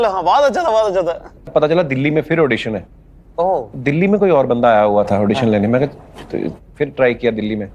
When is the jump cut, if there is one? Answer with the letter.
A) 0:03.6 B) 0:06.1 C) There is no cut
A